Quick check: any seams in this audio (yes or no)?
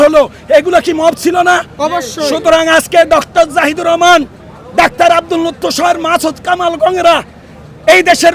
no